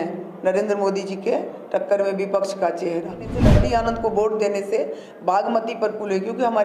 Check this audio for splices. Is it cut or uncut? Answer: cut